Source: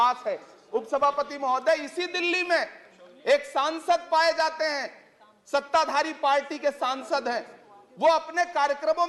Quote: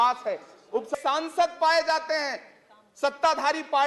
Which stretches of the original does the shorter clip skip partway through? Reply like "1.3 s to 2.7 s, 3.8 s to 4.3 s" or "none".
0.9 s to 3.4 s